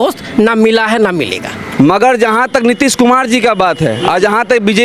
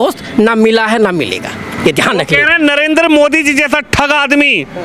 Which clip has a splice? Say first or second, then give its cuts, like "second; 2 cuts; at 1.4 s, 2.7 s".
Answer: first; 1 cut; at 1.6 s